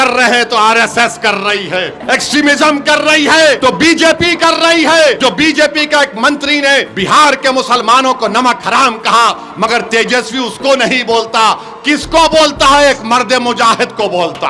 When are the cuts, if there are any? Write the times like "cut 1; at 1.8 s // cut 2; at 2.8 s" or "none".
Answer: cut 1; at 2.0 s // cut 2; at 3.6 s // cut 3; at 5.2 s // cut 4; at 6.9 s